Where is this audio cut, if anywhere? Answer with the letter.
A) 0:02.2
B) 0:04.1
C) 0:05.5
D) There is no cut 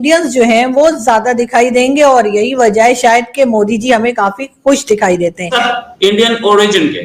C